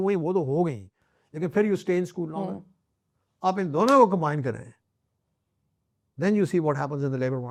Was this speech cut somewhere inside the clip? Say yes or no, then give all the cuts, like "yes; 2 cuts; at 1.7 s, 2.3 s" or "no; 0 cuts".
no; 0 cuts